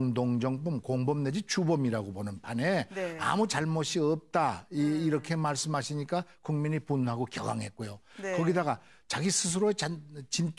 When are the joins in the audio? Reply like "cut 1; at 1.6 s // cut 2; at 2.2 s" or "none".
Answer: none